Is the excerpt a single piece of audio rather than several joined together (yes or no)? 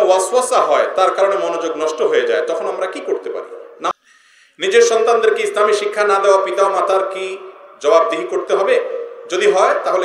no